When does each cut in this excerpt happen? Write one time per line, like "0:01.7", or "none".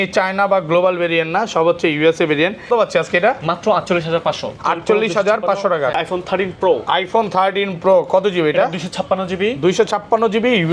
0:02.7
0:06.0